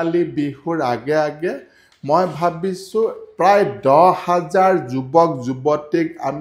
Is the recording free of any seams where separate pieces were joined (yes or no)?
yes